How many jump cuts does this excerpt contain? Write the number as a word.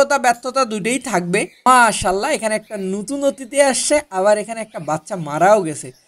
one